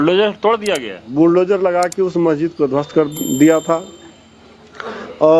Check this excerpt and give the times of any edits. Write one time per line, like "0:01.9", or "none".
none